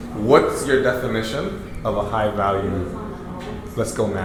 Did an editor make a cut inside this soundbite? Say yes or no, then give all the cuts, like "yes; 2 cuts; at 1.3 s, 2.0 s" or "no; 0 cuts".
no; 0 cuts